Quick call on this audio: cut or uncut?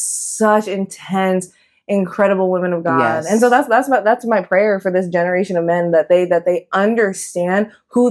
uncut